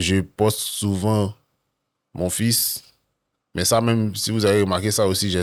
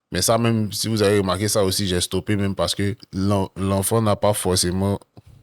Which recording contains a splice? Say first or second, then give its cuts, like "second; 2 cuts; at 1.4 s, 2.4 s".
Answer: second; 1 cut; at 3.0 s